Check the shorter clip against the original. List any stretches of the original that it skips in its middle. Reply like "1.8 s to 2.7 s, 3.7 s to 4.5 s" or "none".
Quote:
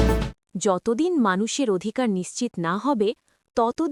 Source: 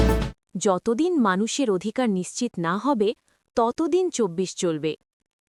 none

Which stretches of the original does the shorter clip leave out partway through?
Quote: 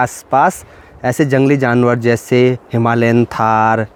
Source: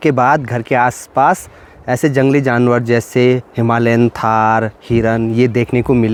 none

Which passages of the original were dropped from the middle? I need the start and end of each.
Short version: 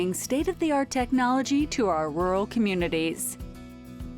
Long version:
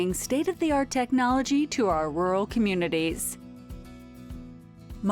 3.2 s to 3.5 s

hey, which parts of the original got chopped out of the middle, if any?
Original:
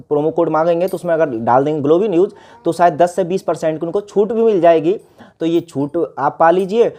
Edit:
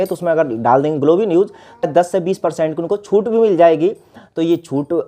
2.7 s to 2.9 s

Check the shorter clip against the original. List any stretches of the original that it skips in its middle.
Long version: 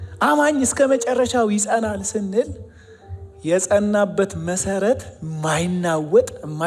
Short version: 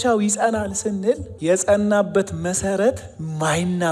2.6 s to 3.3 s

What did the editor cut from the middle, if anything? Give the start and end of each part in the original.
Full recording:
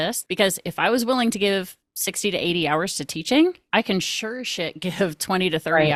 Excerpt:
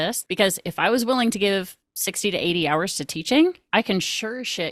none

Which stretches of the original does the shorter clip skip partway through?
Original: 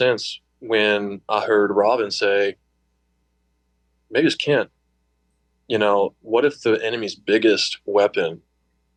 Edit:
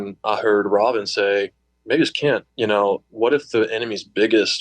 2.7 s to 3.9 s, 4.7 s to 5.6 s

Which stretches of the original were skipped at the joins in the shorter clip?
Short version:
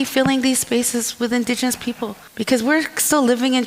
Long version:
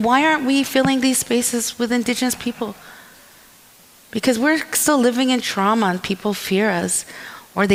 2.8 s to 4.0 s

